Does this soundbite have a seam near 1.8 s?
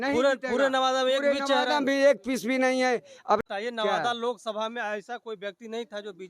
no; 1 cut; at 3.4 s

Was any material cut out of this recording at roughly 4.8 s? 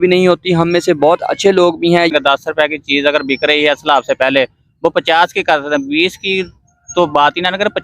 no; 1 cut; at 2.1 s

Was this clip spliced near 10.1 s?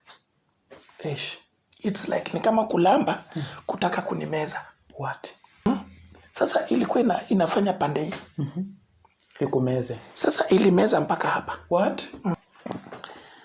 no; 2 cuts; at 5.7 s, 12.3 s

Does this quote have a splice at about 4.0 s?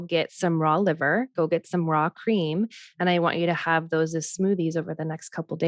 no; 0 cuts

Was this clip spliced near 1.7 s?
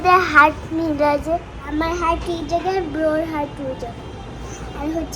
yes; 1 cut; at 1.7 s

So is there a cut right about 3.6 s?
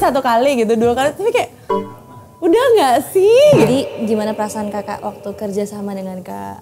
yes; 1 cut; at 3.6 s

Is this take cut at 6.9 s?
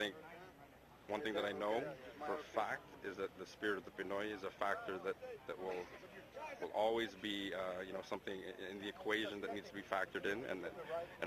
yes; 1 cut; at 6.9 s

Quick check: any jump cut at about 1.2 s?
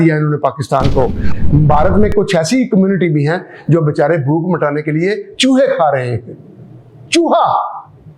yes; 1 cut; at 1.2 s

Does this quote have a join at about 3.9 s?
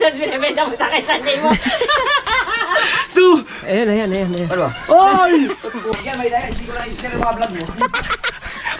no; 1 cut; at 6.0 s

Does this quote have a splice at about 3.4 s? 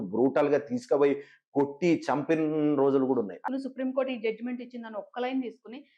yes; 1 cut; at 3.4 s

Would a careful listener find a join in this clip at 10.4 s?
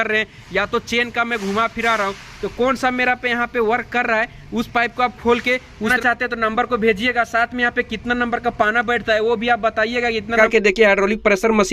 yes; 2 cuts; at 5.9 s, 10.4 s

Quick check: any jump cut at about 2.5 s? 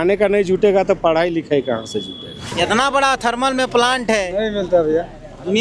yes; 1 cut; at 2.5 s

